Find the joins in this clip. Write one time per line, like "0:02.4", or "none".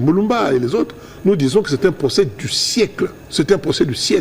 0:03.2